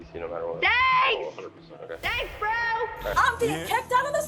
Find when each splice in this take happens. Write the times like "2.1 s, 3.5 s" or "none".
3.1 s